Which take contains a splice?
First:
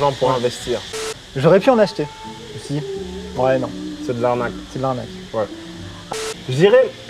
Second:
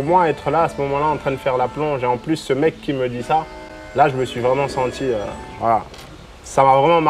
first; 2 cuts; at 0.8 s, 6.1 s

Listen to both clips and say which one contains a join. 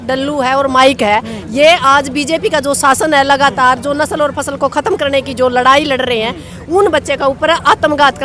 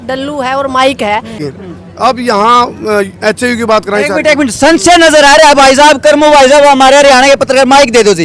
second; 1 cut; at 1.4 s

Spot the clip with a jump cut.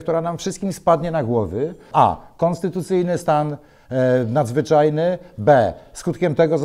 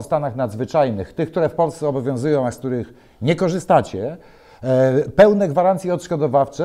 first; 1 cut; at 1.9 s

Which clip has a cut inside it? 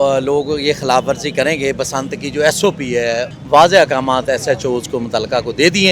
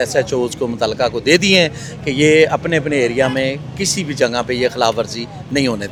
first; 1 cut; at 3.3 s

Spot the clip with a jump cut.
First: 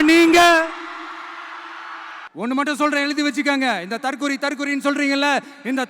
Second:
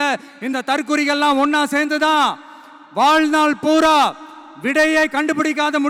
first; 1 cut; at 2.3 s

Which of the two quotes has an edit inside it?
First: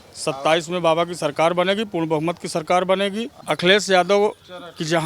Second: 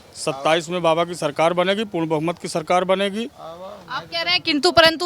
first; 1 cut; at 3.3 s

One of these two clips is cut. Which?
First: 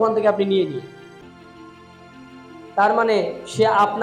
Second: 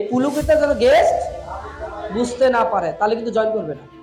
first; 1 cut; at 1.2 s

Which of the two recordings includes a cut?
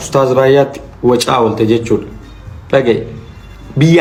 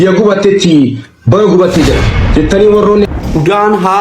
second; 1 cut; at 3.1 s

